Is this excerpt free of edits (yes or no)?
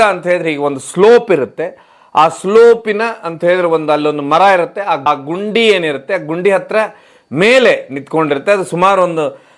yes